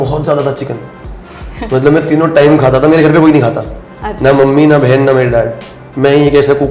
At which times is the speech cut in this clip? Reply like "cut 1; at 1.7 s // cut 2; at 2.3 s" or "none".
none